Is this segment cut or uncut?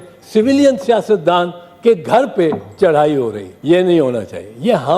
cut